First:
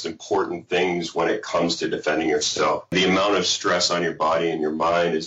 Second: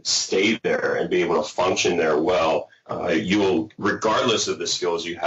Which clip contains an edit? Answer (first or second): first